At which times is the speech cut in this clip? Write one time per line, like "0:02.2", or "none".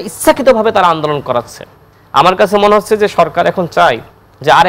none